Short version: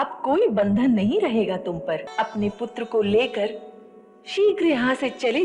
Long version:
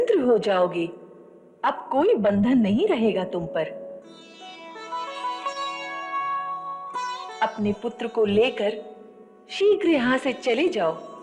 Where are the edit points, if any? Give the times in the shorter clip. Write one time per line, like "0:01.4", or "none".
0:02.1